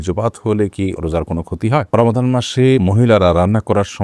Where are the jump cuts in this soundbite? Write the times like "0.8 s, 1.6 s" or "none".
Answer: 1.9 s, 2.8 s